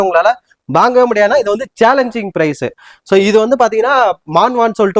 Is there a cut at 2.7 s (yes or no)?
no